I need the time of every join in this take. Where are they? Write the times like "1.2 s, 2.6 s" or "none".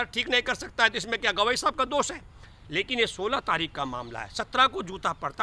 none

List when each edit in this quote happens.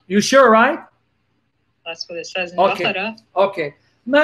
3.2 s

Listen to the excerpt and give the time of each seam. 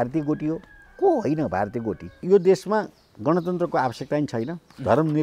2.2 s

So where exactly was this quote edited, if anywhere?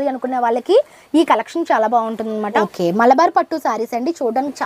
2.5 s

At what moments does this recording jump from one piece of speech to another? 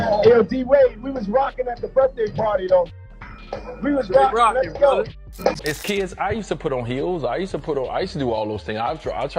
5.6 s

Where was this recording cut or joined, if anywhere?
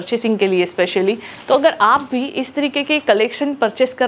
none

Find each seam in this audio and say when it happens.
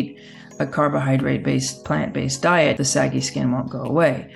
2.8 s

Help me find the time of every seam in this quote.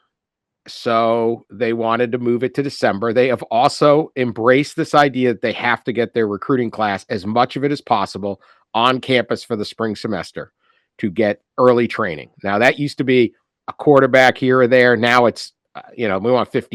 none

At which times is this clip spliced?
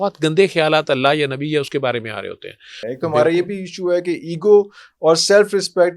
2.8 s

